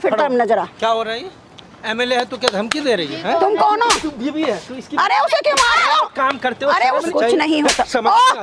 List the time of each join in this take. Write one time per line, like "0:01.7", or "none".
0:07.1